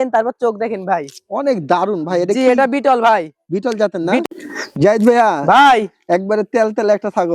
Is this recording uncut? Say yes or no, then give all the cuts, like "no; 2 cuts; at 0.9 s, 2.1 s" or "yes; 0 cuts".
no; 1 cut; at 4.2 s